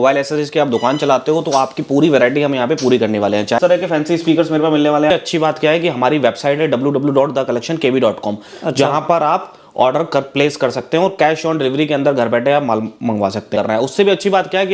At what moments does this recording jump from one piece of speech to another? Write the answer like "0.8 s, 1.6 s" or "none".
3.6 s, 5.1 s, 13.5 s